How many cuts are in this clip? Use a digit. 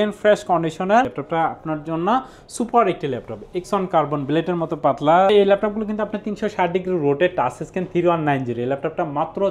2